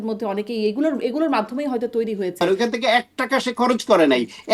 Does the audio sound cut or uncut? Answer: cut